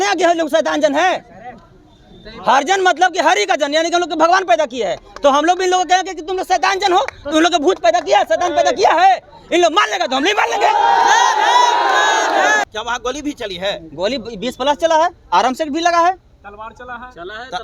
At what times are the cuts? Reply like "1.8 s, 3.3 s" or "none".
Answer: 12.6 s